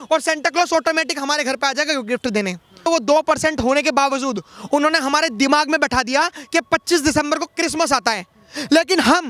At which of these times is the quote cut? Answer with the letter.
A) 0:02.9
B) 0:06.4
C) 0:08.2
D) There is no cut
A